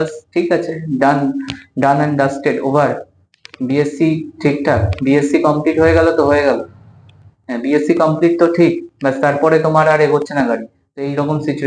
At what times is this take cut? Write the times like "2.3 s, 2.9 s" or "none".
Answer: none

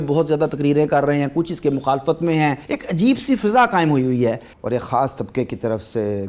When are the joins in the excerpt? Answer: 2.7 s, 4.5 s

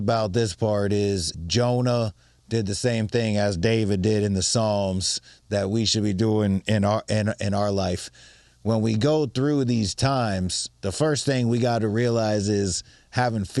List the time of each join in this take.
1.3 s

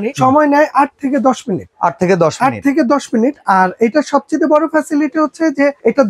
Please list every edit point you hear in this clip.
none

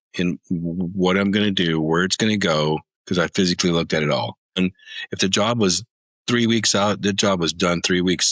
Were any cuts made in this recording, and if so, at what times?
4.6 s

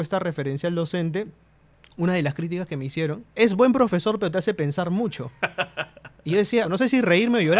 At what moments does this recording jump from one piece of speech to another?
3.3 s, 6.7 s

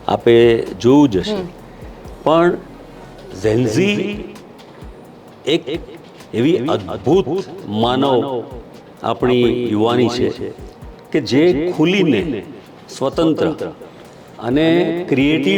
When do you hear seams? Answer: none

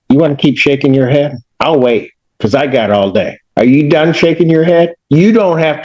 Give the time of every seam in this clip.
1.4 s, 3.4 s

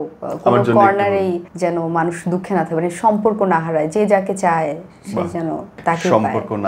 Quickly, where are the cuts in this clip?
1.5 s, 5.7 s

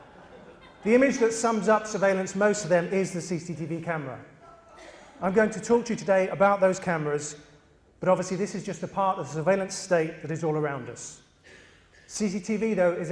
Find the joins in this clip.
none

